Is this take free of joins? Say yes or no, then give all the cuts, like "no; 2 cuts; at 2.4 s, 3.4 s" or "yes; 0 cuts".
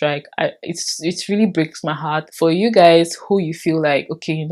yes; 0 cuts